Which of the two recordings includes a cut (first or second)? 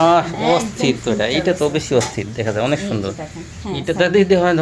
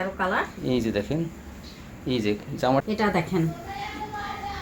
second